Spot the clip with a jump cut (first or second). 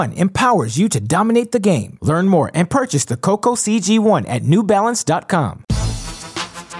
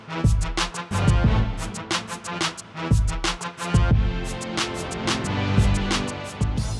first